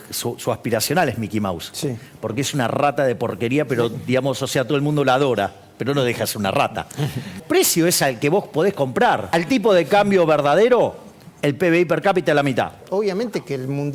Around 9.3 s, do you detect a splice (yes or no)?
yes